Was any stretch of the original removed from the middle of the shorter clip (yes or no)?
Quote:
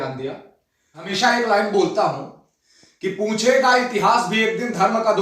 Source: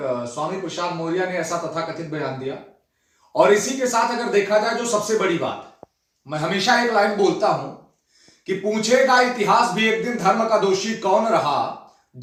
yes